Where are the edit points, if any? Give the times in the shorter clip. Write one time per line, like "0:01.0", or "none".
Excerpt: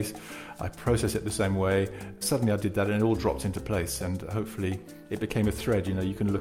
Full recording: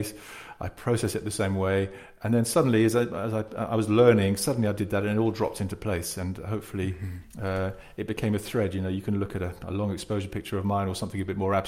0:02.2
0:05.0

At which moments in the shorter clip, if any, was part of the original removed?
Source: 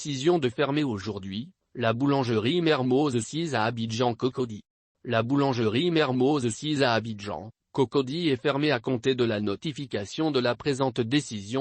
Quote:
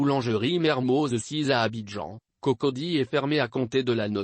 0:00.9

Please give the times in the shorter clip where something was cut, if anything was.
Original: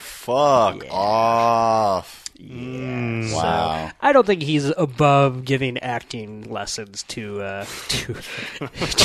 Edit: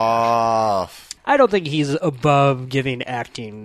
0:01.1

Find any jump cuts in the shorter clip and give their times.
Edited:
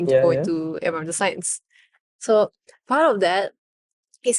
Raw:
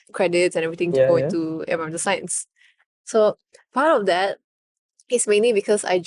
none

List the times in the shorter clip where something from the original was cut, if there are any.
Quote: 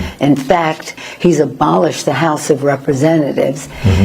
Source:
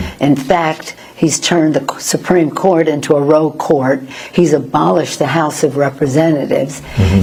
0:01.0

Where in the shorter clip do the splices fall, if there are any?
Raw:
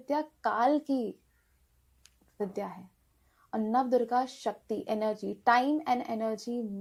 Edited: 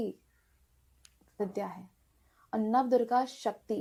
none

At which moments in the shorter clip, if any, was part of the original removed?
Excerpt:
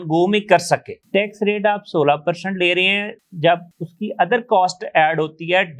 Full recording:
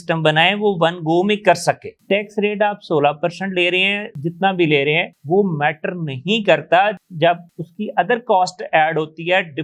0:03.3

